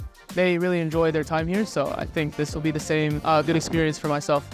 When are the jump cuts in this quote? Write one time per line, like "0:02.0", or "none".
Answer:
0:03.2